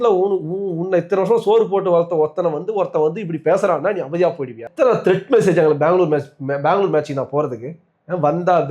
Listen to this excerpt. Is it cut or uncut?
cut